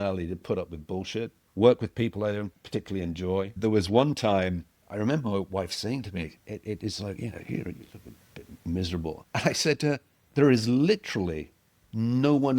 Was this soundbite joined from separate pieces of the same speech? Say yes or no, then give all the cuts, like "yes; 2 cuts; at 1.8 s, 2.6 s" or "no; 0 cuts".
yes; 6 cuts; at 1.4 s, 2.6 s, 3.5 s, 4.7 s, 9.2 s, 10.1 s